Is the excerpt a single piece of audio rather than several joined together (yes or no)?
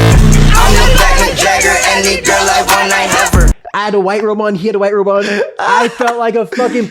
no